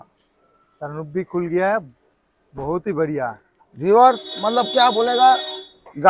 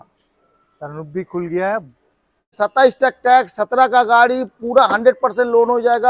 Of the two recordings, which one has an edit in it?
second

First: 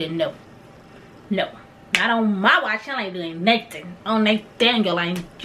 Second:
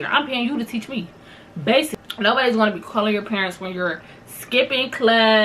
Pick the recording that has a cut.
second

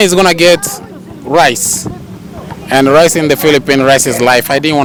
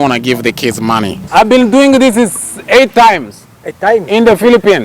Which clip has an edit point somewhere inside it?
second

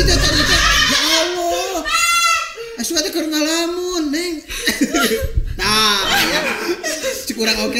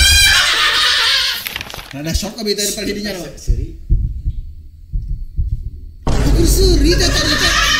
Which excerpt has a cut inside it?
second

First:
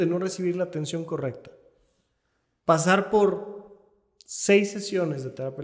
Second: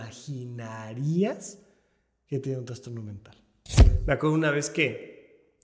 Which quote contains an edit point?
second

